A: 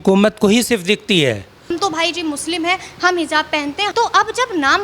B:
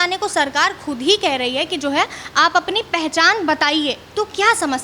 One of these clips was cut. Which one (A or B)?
A